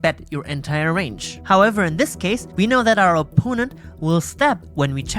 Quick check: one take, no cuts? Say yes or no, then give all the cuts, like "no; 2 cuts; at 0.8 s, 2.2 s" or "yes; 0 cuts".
no; 2 cuts; at 1.3 s, 2.5 s